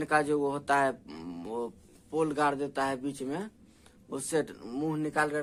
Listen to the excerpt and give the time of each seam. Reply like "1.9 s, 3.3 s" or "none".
none